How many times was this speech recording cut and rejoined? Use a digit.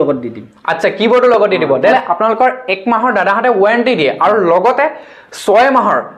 1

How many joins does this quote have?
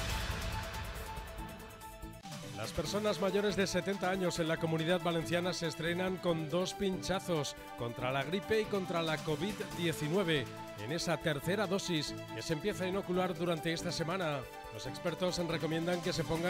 1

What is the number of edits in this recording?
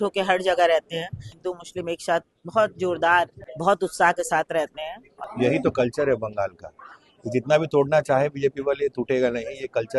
3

